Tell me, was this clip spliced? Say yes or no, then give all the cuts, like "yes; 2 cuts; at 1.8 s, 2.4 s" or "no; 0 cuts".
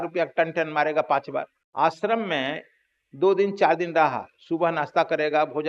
yes; 1 cut; at 1.6 s